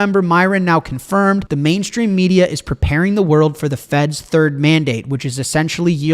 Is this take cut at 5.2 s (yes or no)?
no